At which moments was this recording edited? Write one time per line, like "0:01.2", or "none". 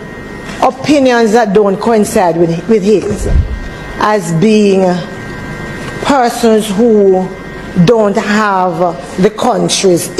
none